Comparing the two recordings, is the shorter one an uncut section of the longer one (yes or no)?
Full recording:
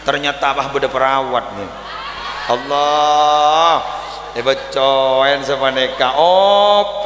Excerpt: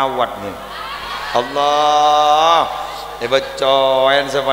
yes